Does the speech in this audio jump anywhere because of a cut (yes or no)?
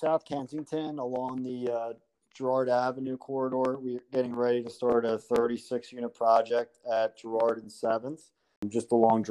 no